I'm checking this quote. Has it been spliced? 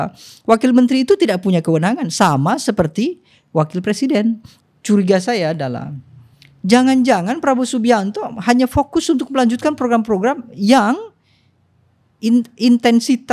yes; 1 cut; at 4.5 s

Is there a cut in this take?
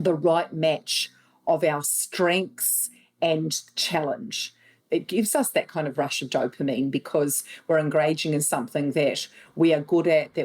yes; 1 cut; at 4.8 s

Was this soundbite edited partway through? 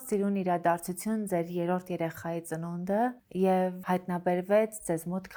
no; 0 cuts

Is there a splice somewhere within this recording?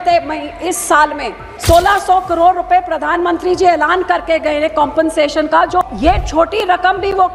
yes; 2 cuts; at 1.5 s, 5.9 s

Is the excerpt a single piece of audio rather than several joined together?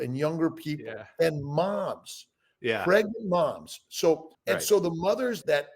no; 1 cut; at 4.3 s

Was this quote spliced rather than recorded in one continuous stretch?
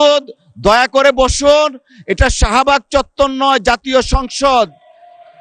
no; 0 cuts

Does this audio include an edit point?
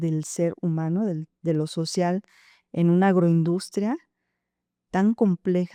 no; 0 cuts

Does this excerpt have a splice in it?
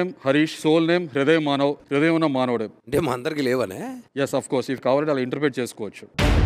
no; 0 cuts

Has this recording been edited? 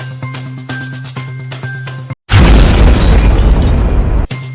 yes; 1 cut; at 1.1 s

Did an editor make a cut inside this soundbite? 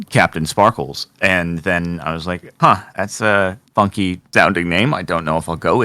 no; 0 cuts

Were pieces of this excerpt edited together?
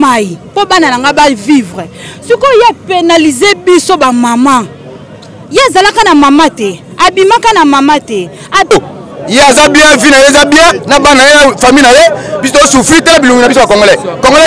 yes; 1 cut; at 8.7 s

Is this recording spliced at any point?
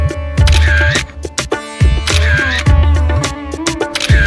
no; 0 cuts

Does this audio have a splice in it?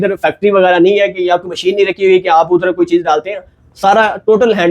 no; 0 cuts

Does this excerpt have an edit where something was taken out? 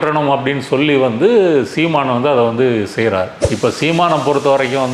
yes; 1 cut; at 3.4 s

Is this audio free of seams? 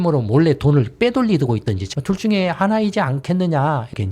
no; 1 cut; at 1.9 s

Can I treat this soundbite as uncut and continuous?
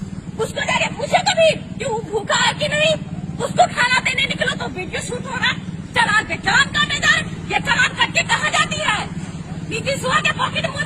yes; 0 cuts

